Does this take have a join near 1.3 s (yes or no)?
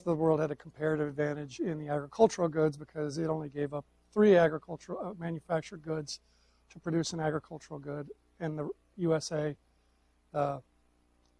yes